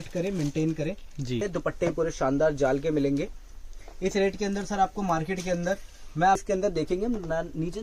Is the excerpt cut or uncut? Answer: cut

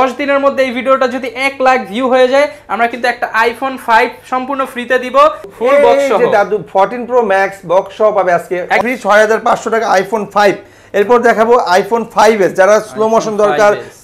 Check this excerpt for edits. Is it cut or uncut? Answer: cut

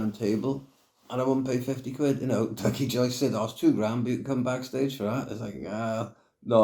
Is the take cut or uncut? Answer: uncut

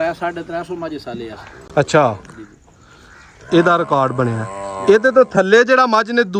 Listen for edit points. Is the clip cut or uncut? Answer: uncut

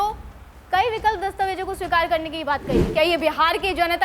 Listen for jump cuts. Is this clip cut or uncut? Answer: cut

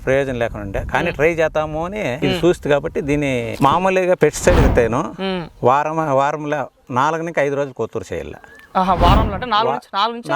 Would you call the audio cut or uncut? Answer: cut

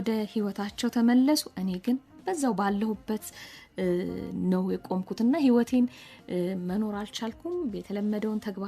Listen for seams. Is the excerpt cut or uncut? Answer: uncut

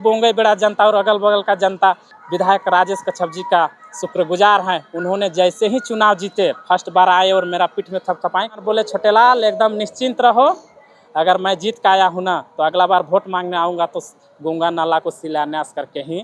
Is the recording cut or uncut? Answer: cut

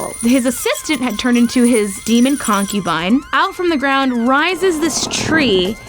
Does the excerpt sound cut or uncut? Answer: cut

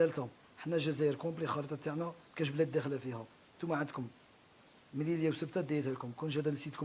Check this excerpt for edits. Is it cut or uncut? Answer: cut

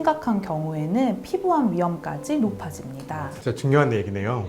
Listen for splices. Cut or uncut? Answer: cut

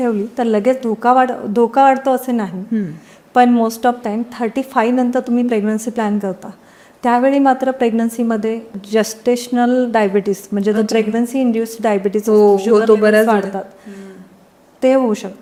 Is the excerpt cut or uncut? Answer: uncut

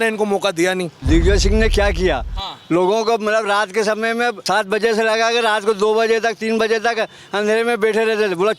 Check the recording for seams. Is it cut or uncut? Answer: cut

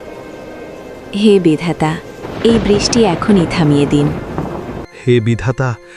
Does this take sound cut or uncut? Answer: cut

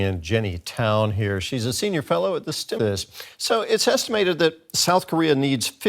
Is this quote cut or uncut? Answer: cut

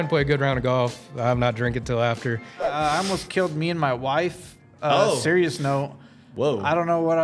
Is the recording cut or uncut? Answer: cut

